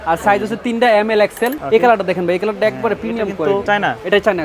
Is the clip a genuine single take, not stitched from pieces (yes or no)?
no